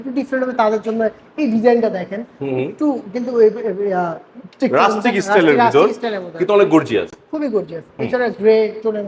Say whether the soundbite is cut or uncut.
uncut